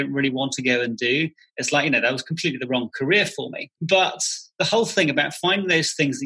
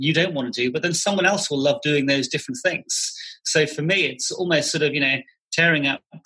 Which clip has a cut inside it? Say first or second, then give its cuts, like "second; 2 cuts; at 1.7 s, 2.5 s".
first; 1 cut; at 3.7 s